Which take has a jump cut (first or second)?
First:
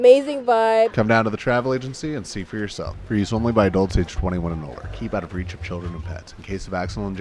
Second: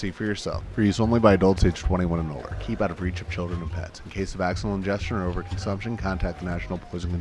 first